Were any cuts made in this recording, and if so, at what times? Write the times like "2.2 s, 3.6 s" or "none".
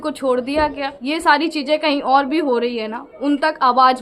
0.9 s